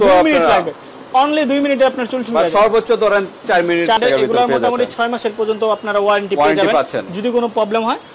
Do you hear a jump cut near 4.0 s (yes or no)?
yes